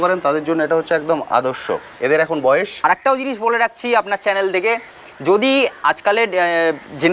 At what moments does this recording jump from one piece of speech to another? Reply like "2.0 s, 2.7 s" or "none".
2.8 s